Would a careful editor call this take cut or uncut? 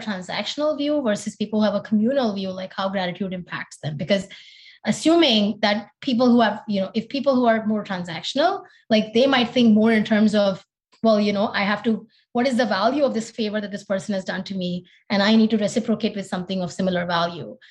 uncut